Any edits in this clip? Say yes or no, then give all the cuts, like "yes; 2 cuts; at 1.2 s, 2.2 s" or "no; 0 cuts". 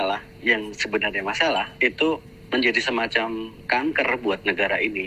no; 0 cuts